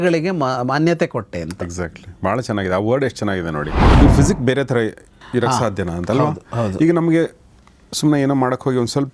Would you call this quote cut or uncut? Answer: cut